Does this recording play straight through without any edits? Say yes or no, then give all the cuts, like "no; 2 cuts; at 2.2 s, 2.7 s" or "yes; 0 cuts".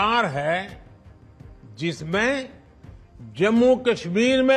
yes; 0 cuts